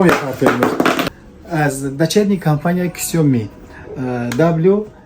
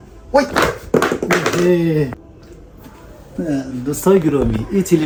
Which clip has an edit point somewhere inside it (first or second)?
first